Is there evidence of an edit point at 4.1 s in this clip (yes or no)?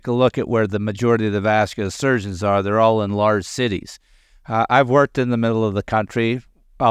no